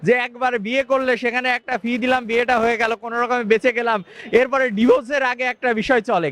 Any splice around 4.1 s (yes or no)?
no